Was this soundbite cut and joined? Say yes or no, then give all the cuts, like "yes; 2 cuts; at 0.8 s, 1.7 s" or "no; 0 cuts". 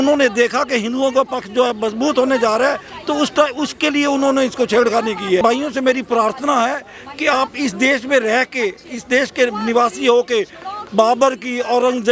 yes; 1 cut; at 5.4 s